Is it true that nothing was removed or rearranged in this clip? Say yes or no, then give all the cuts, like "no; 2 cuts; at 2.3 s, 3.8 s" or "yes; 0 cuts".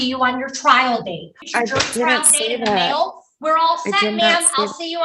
no; 1 cut; at 1.3 s